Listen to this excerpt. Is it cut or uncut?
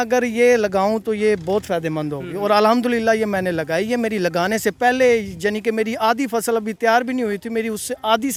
uncut